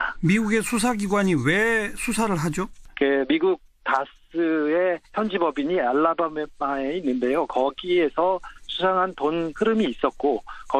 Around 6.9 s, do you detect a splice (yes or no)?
no